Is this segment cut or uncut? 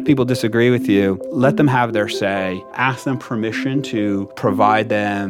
cut